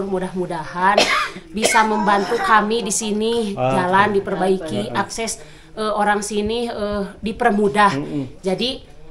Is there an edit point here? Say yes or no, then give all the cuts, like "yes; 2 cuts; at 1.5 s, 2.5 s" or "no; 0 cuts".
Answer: no; 0 cuts